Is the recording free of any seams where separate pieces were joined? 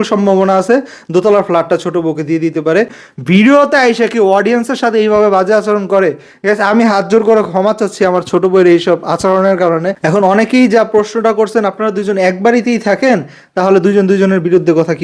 no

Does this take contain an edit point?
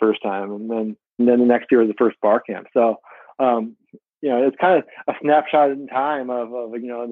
yes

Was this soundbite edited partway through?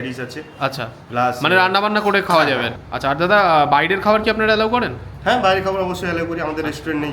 yes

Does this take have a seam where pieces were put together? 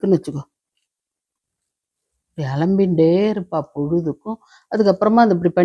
no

